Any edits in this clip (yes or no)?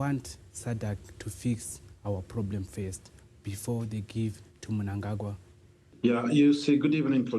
yes